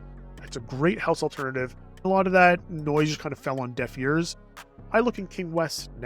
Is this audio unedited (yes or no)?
no